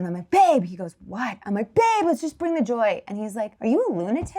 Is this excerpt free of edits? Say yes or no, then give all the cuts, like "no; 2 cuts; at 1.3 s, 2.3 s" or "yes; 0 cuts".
no; 1 cut; at 3.5 s